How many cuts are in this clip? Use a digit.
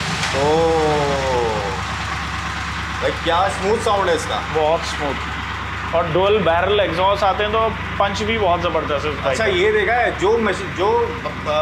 0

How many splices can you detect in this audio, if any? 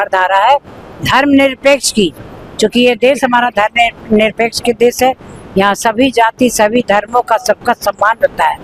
0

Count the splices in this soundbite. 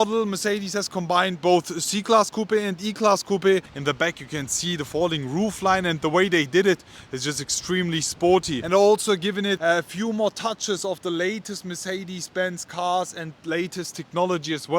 2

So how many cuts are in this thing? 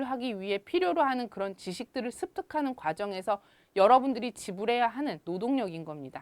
1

